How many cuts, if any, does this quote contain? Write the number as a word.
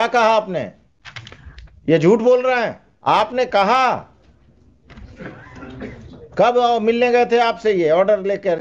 one